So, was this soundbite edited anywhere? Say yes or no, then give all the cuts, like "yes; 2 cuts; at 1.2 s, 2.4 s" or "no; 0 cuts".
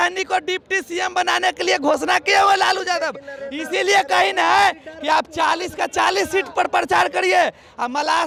no; 0 cuts